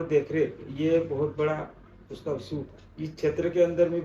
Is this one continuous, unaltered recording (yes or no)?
no